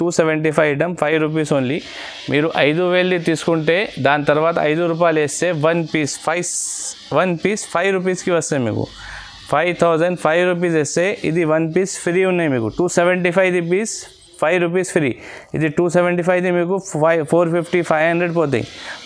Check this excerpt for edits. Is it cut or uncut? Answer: uncut